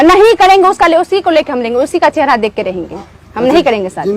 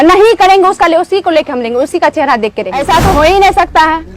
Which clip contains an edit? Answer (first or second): second